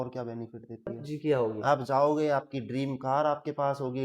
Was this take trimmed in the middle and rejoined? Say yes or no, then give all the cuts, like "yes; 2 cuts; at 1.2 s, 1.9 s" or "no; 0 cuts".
yes; 1 cut; at 1.0 s